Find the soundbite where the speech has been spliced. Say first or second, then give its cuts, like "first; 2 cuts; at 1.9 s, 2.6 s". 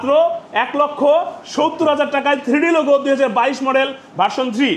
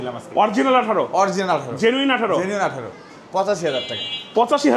second; 1 cut; at 3.0 s